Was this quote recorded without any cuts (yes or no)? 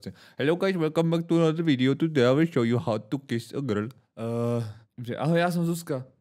no